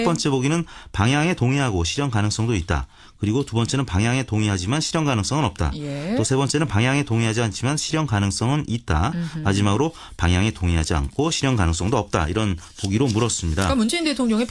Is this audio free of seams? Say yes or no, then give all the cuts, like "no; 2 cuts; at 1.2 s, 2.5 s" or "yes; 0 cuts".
yes; 0 cuts